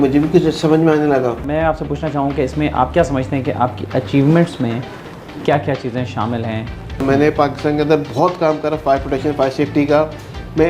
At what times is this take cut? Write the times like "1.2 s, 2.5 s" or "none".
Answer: 1.4 s, 7.0 s